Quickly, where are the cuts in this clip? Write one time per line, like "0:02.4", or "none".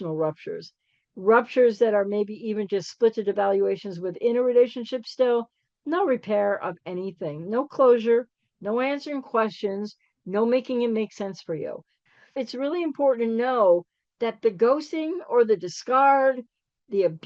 0:11.9